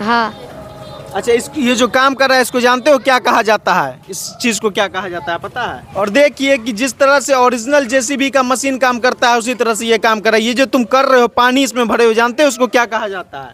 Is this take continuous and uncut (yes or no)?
yes